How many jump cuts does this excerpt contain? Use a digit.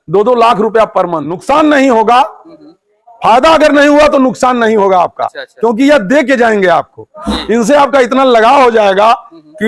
1